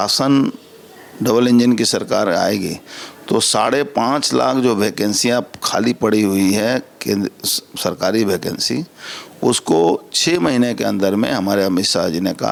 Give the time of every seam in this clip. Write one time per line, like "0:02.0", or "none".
none